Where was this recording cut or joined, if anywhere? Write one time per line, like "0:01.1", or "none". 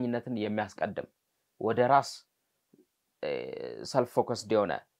none